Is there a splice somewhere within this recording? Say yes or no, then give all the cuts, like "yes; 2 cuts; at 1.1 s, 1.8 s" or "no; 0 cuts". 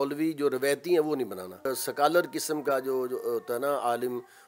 yes; 1 cut; at 1.8 s